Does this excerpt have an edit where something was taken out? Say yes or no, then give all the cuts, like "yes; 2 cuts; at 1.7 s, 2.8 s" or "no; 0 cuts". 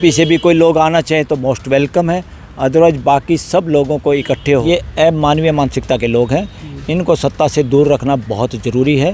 yes; 1 cut; at 4.6 s